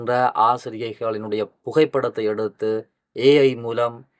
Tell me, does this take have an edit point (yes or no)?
no